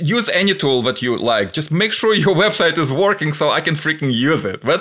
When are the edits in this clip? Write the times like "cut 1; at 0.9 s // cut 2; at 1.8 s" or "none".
none